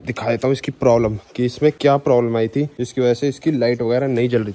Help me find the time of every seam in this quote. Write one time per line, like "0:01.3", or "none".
0:01.8
0:02.8